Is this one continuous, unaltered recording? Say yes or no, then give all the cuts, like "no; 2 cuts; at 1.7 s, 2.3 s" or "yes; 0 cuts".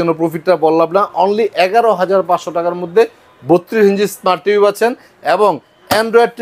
yes; 0 cuts